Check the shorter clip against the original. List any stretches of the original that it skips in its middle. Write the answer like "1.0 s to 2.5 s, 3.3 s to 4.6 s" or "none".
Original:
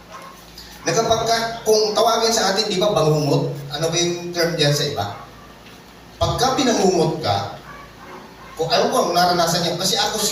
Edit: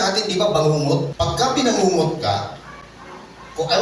3.8 s to 6.4 s